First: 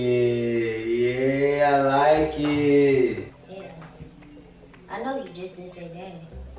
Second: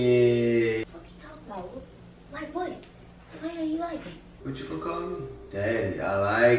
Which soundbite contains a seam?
second; 2 cuts; at 0.8 s, 4.2 s

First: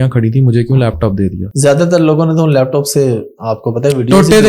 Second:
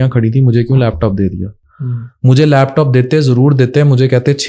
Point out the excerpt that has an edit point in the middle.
first; 1 cut; at 1.4 s

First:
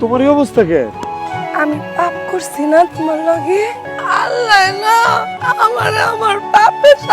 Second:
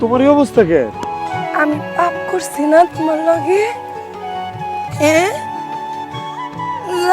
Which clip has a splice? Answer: first; 2 cuts; at 3.9 s, 5.3 s

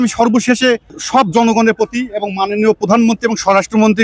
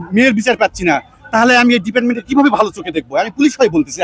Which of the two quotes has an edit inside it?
first; 1 cut; at 0.9 s

